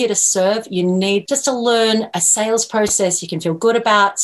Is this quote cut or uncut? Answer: cut